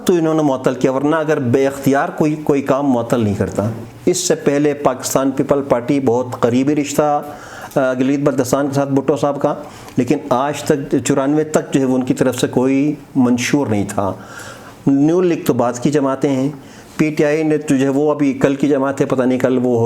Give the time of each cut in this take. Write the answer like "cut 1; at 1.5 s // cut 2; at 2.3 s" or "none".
cut 1; at 3.8 s